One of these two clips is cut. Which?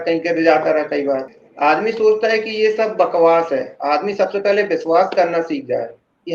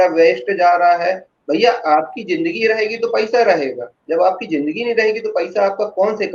first; 1 cut; at 1.3 s

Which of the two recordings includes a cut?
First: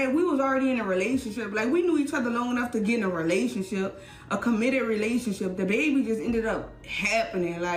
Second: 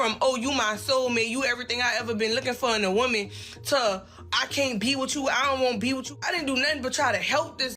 second; 1 cut; at 6.1 s

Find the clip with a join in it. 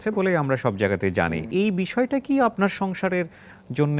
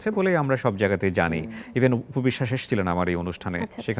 first; 2 cuts; at 1.5 s, 2.5 s

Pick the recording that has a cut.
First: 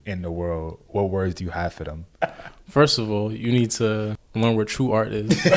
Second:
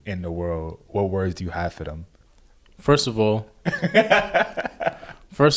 first; 2 cuts; at 2.1 s, 4.2 s

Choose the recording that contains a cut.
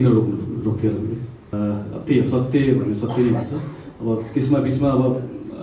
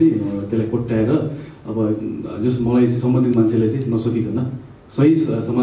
first; 1 cut; at 1.5 s

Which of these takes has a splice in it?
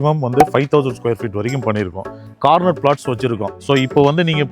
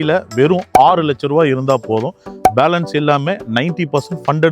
first; 1 cut; at 2.3 s

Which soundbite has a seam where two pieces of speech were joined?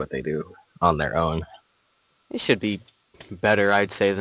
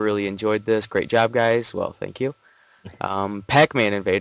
second; 1 cut; at 2.3 s

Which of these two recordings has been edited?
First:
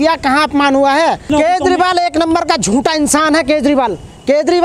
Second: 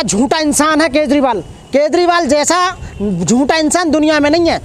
first; 1 cut; at 1.3 s

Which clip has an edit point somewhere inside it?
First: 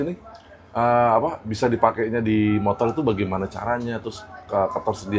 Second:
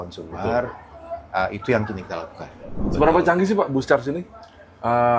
second; 1 cut; at 2.8 s

